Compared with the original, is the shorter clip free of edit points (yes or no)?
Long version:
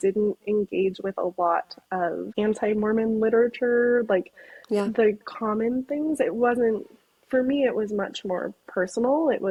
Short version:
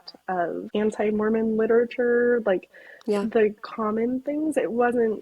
yes